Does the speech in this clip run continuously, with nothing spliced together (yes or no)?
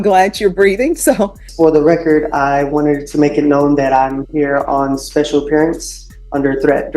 no